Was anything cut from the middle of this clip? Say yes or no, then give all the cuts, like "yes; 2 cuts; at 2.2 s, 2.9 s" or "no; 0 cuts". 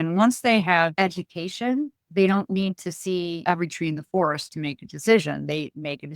yes; 2 cuts; at 0.9 s, 3.4 s